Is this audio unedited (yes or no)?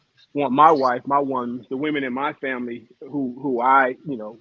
yes